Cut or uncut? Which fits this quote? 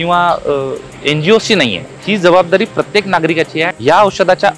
cut